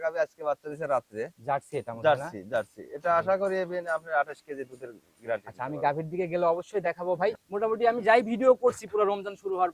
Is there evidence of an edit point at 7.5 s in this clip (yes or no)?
yes